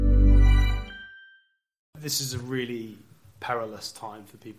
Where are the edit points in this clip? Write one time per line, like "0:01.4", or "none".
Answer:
0:01.9